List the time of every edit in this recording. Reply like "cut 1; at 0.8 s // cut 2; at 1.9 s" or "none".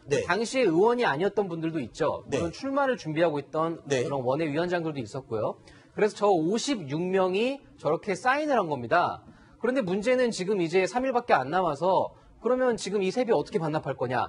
cut 1; at 8.4 s